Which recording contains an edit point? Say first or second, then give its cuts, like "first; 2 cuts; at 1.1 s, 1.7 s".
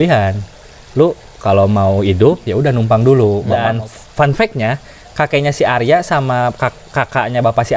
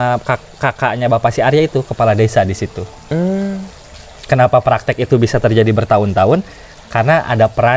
first; 1 cut; at 3.6 s